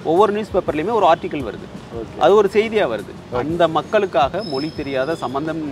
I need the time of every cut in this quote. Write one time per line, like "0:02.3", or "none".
0:03.2